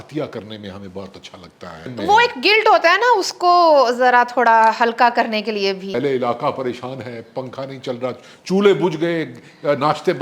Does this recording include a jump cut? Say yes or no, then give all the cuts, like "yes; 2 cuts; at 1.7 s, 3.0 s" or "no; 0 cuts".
yes; 2 cuts; at 1.9 s, 5.9 s